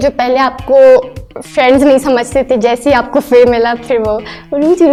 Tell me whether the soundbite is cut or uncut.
uncut